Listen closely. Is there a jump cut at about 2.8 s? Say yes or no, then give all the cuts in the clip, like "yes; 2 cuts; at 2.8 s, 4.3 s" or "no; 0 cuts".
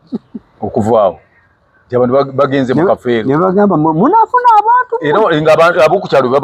no; 0 cuts